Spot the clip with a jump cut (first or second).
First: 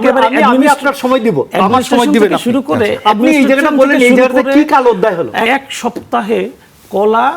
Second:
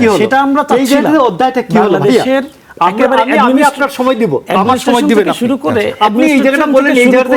first